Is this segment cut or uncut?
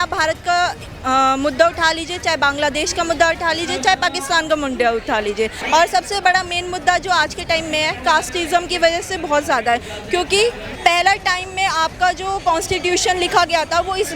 cut